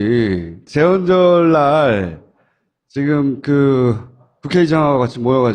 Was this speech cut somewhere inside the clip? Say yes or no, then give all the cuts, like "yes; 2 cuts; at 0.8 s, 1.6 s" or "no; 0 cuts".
yes; 1 cut; at 4.0 s